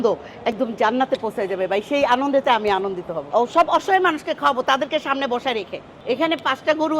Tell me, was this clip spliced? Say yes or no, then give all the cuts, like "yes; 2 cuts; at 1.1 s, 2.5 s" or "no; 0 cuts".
yes; 2 cuts; at 3.2 s, 5.9 s